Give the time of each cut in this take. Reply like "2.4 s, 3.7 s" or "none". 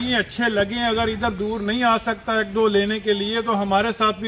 none